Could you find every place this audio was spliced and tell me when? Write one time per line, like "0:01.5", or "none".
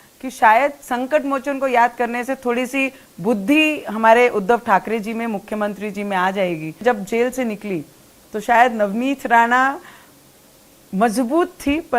0:06.8